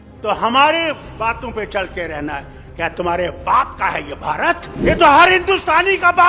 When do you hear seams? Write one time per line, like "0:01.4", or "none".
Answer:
0:04.9